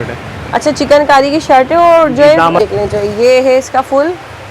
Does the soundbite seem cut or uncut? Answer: cut